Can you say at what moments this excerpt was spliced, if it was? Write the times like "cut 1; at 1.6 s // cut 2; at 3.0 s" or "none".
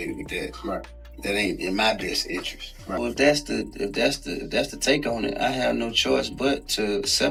none